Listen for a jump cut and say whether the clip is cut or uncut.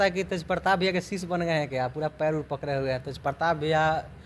uncut